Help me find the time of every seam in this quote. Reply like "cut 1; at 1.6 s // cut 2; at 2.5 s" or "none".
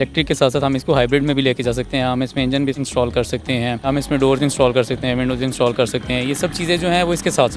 cut 1; at 2.8 s // cut 2; at 3.9 s